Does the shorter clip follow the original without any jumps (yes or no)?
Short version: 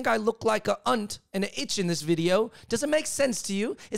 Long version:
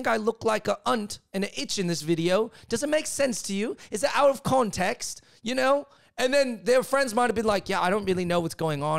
yes